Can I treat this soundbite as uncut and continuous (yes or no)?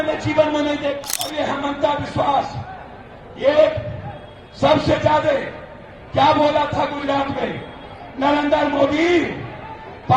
no